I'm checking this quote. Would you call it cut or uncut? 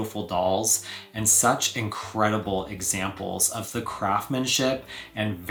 uncut